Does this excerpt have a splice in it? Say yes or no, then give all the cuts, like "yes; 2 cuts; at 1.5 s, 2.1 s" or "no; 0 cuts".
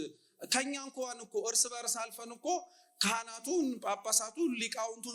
no; 0 cuts